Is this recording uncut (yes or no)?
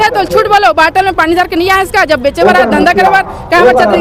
yes